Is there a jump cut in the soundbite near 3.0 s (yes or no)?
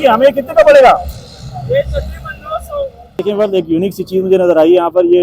yes